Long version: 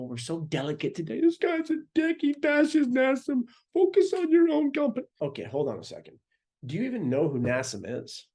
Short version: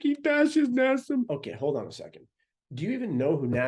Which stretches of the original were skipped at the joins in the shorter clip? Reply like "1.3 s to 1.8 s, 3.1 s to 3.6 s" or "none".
3.6 s to 5.3 s